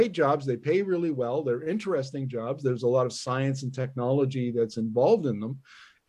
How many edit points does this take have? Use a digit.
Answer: 0